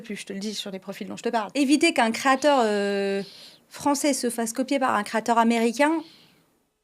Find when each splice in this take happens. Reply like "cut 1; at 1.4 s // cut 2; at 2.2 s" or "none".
cut 1; at 1.5 s